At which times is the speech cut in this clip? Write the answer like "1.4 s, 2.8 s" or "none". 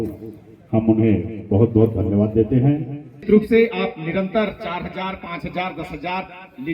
3.3 s